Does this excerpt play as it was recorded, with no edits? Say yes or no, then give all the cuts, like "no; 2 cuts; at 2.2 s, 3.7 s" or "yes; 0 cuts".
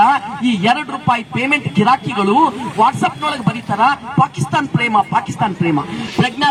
yes; 0 cuts